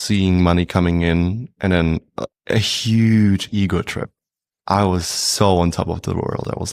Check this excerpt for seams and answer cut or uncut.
uncut